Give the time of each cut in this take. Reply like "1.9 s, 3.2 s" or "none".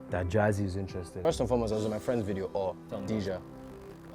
1.1 s